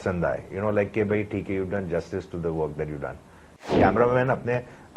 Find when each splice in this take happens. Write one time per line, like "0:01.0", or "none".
0:03.7